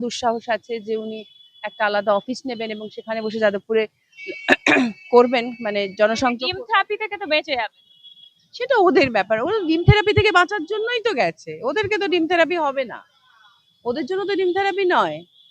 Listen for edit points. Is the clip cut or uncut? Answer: uncut